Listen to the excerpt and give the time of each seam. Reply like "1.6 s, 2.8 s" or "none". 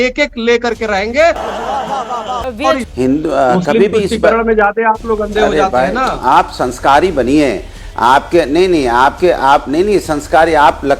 2.9 s